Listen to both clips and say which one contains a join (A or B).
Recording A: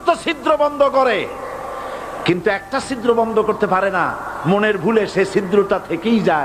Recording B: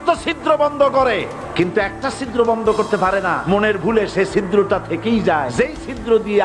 B